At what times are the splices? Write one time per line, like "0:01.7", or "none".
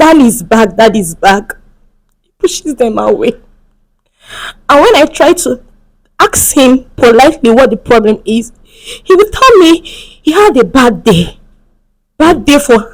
none